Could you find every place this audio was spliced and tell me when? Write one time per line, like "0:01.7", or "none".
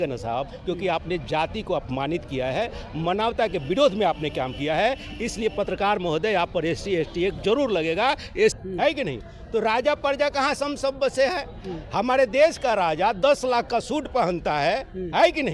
0:08.6